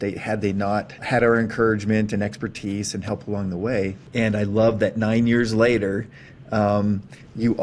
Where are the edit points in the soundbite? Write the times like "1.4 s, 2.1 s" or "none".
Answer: 1.0 s, 4.0 s